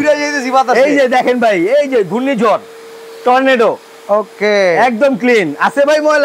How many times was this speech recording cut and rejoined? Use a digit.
0